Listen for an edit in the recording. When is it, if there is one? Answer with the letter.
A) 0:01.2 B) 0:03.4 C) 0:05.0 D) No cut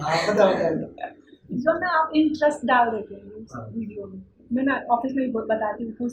D